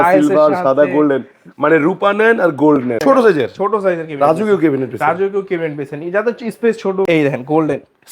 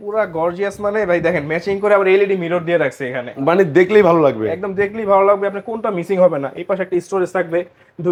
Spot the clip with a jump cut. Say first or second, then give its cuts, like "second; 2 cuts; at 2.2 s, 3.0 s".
first; 2 cuts; at 3.0 s, 7.1 s